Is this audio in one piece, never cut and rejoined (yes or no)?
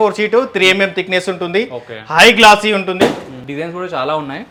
yes